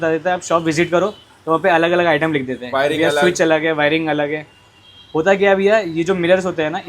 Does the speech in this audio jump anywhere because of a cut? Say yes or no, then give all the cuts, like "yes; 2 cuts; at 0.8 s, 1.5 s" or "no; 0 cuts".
no; 0 cuts